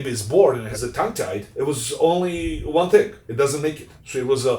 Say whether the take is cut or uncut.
cut